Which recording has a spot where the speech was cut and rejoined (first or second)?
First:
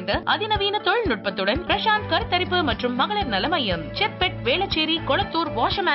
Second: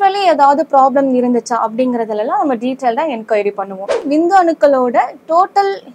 second